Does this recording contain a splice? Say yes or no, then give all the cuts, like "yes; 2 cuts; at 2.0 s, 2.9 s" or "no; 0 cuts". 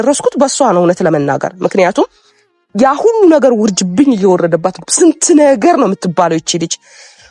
no; 0 cuts